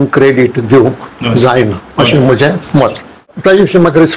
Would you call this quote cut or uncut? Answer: cut